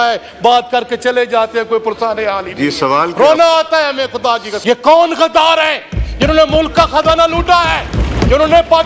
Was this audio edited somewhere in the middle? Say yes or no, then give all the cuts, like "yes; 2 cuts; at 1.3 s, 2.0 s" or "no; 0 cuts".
yes; 1 cut; at 4.5 s